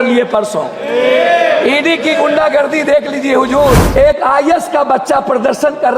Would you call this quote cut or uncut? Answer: cut